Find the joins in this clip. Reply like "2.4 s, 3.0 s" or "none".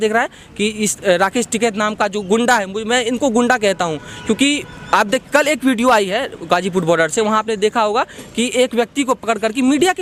none